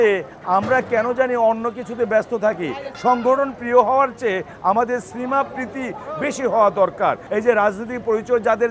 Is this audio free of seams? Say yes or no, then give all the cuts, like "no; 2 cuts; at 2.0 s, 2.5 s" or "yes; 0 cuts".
no; 2 cuts; at 2.8 s, 7.2 s